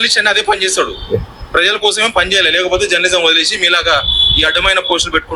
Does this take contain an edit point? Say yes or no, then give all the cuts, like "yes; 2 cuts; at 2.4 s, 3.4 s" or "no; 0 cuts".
no; 0 cuts